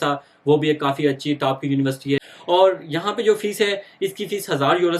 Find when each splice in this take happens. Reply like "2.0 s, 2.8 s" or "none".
2.3 s